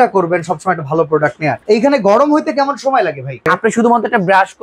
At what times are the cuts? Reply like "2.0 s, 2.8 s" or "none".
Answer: 1.6 s, 3.5 s